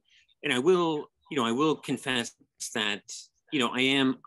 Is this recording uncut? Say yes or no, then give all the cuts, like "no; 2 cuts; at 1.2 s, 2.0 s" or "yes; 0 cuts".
yes; 0 cuts